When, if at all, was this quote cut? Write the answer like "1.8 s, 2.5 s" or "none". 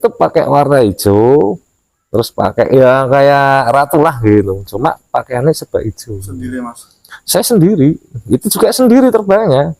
none